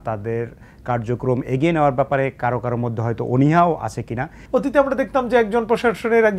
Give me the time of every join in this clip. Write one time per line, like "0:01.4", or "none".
0:04.4